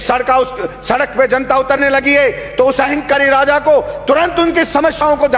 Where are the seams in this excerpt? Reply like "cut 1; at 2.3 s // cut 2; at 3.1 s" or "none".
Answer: none